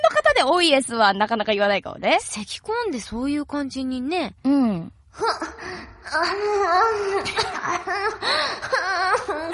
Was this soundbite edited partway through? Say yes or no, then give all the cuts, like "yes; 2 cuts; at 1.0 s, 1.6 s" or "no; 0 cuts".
no; 0 cuts